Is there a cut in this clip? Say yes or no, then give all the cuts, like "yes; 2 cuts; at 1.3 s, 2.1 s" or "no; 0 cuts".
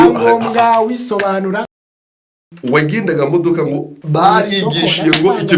yes; 2 cuts; at 2.0 s, 4.0 s